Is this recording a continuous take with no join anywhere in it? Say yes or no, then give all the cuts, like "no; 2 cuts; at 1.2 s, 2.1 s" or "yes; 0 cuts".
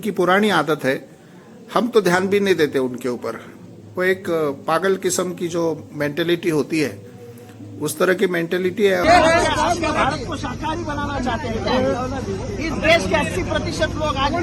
no; 1 cut; at 9.0 s